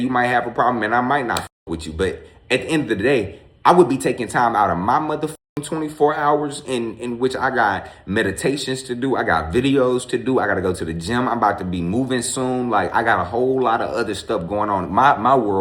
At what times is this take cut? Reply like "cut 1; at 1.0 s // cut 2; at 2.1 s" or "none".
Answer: none